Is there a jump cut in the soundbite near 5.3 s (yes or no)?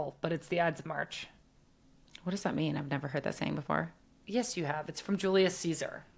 no